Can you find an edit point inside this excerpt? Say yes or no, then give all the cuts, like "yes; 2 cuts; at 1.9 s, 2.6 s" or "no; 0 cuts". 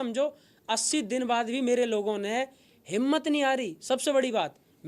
no; 0 cuts